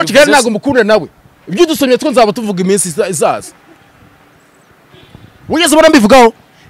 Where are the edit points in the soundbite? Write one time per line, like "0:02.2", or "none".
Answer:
none